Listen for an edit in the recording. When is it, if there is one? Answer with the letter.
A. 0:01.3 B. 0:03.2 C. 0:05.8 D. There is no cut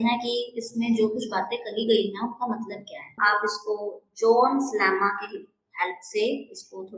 B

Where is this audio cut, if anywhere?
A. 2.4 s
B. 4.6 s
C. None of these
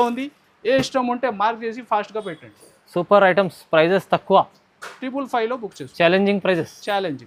C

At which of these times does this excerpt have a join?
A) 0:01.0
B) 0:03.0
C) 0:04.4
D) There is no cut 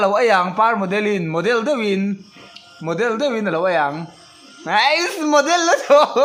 D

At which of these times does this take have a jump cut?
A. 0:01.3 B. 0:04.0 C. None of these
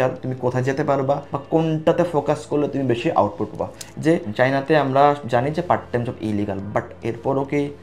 B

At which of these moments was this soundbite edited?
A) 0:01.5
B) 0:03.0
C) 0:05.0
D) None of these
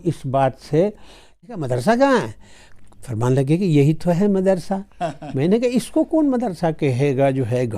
A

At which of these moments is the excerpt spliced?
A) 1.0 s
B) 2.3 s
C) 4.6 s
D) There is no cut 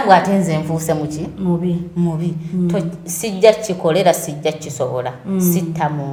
D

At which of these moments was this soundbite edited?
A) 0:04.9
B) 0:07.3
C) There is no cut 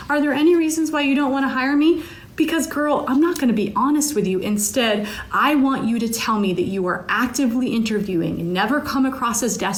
C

